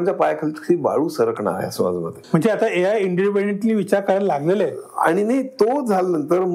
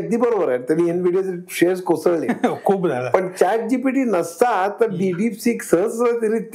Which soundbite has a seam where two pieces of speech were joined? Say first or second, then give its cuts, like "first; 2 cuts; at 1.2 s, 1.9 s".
first; 1 cut; at 2.1 s